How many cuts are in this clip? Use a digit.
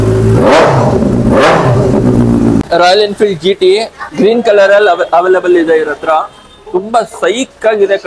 1